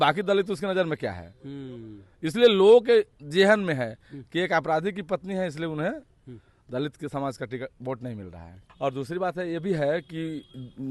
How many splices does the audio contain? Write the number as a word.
zero